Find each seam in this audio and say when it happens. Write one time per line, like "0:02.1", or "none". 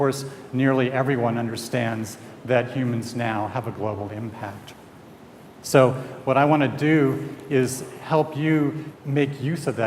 0:02.4